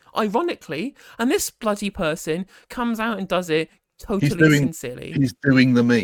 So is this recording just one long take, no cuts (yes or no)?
yes